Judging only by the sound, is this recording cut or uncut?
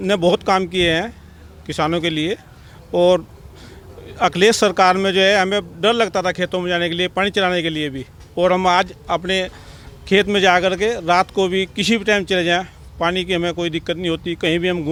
uncut